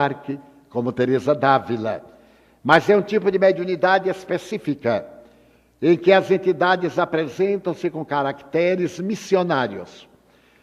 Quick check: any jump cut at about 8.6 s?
no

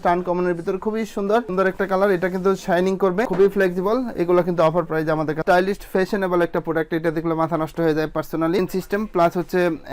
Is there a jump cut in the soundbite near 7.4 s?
no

